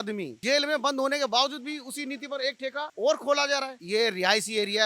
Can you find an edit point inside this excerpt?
yes; 2 cuts; at 2.9 s, 3.8 s

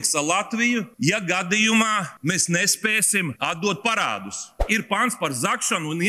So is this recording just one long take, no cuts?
no; 4 cuts; at 0.9 s, 2.1 s, 3.4 s, 4.6 s

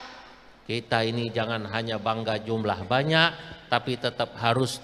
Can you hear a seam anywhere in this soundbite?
no; 0 cuts

